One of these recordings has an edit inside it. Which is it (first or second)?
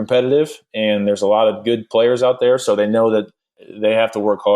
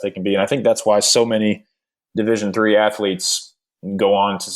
first